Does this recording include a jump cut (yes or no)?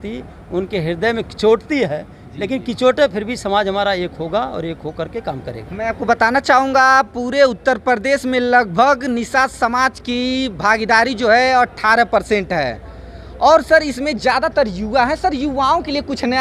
no